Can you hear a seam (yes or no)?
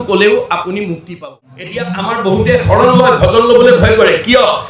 yes